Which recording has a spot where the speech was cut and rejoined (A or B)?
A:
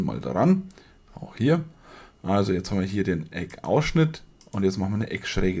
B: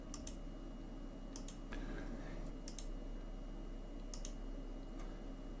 B